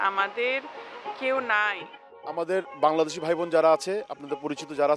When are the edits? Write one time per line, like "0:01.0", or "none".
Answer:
0:02.2